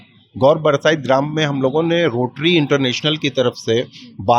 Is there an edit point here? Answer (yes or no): no